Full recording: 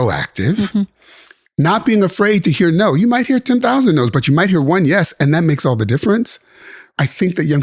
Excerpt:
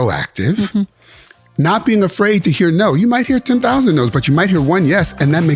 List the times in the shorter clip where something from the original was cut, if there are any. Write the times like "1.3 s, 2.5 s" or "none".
none